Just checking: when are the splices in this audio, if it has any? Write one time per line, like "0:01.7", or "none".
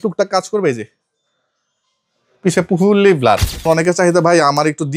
0:03.6